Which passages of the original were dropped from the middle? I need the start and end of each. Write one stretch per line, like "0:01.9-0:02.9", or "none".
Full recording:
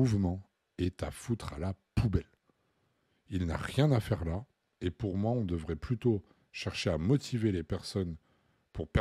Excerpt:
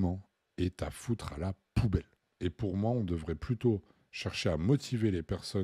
0:02.4-0:04.6